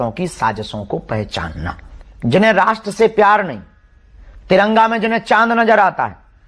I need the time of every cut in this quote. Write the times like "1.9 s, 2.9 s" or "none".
1.9 s